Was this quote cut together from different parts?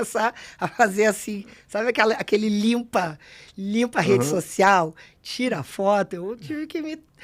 no; 0 cuts

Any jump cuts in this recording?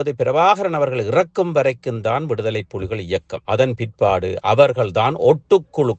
yes; 1 cut; at 3.3 s

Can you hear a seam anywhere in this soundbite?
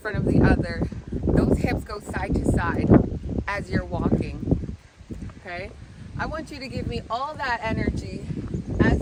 no; 0 cuts

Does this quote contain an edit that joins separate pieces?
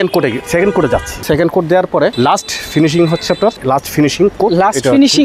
yes; 3 cuts; at 1.2 s, 2.1 s, 3.6 s

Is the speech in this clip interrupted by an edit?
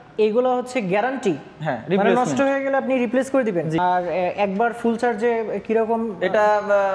yes; 1 cut; at 3.8 s

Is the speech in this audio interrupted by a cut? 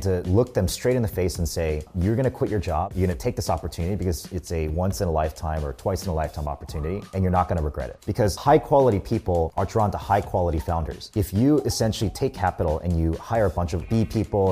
no; 0 cuts

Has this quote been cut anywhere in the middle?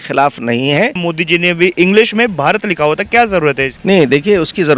yes; 2 cuts; at 1.0 s, 3.7 s

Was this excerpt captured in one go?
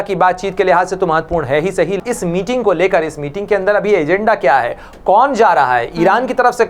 no; 1 cut; at 2.0 s

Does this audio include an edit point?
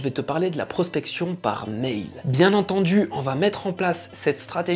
yes; 1 cut; at 2.2 s

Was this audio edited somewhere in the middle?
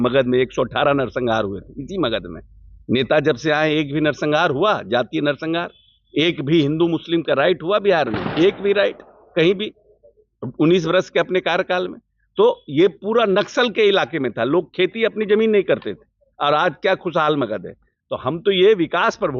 no; 0 cuts

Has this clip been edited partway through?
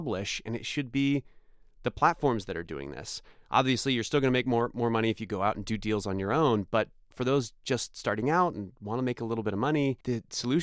no; 0 cuts

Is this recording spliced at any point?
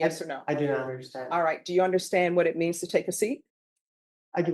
no; 0 cuts

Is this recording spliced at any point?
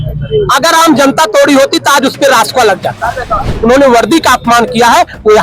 yes; 1 cut; at 3.5 s

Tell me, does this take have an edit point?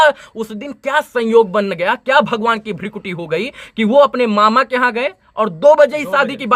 no; 0 cuts

